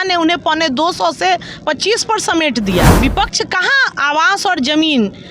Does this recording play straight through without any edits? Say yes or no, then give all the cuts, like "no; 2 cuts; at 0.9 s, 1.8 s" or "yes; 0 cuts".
no; 1 cut; at 3.0 s